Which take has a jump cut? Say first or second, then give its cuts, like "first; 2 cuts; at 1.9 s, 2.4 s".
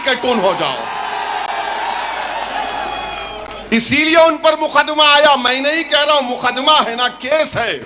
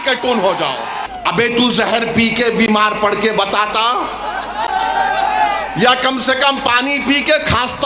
second; 1 cut; at 1.0 s